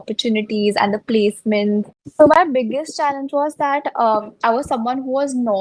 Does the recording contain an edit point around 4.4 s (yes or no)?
no